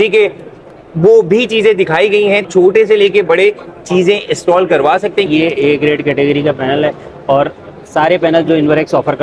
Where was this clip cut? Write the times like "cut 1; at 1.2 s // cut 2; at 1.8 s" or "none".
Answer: cut 1; at 2.4 s // cut 2; at 5.3 s